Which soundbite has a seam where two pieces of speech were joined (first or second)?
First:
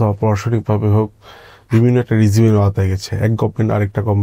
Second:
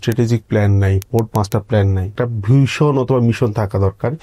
second